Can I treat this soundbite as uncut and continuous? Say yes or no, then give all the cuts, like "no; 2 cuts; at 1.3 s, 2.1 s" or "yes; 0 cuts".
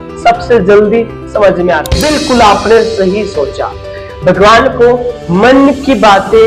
no; 1 cut; at 1.9 s